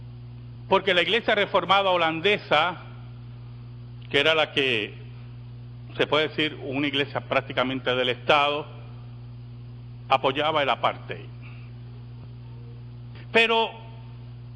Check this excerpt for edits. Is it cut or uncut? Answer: cut